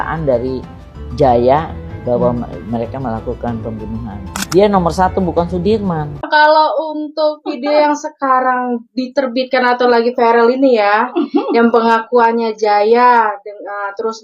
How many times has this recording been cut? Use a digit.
1